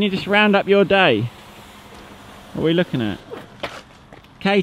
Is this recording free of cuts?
yes; 0 cuts

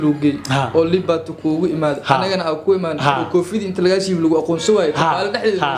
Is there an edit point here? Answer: no; 0 cuts

